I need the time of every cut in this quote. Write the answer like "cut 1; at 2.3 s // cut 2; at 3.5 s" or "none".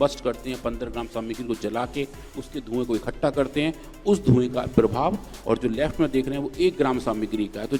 none